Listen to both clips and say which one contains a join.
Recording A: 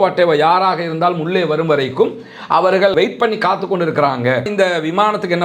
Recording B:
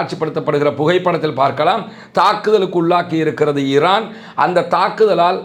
A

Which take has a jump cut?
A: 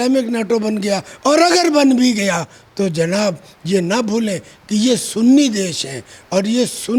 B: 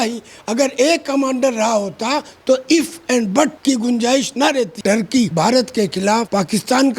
B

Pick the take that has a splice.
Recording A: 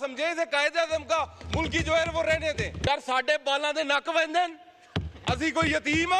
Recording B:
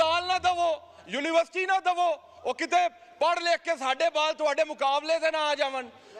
A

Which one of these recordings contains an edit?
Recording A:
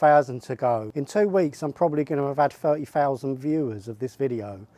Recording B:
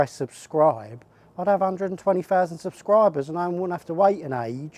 A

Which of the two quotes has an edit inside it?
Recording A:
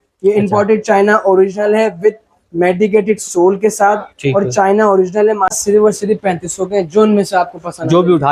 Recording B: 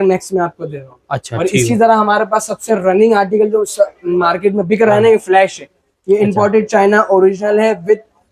A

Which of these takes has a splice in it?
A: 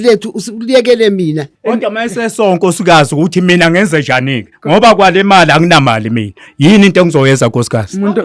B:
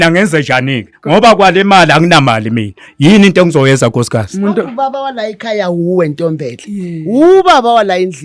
A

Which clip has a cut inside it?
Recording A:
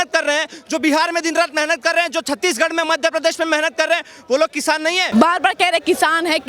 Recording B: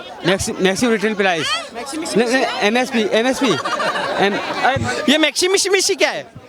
A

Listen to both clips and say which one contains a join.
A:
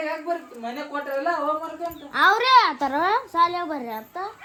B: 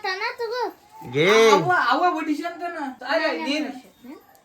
B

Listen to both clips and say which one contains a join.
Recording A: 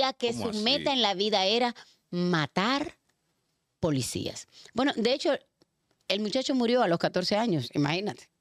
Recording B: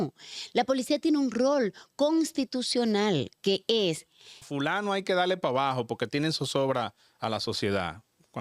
B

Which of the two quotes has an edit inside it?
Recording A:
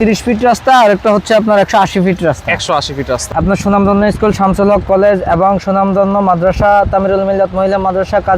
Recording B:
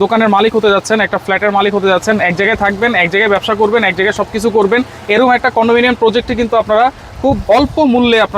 A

